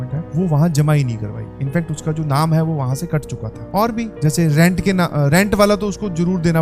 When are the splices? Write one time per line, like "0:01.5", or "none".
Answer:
none